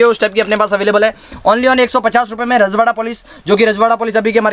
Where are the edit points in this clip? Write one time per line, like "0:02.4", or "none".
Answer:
none